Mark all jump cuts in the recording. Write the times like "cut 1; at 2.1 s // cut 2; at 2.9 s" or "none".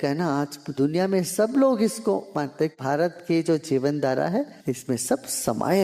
cut 1; at 2.7 s // cut 2; at 4.6 s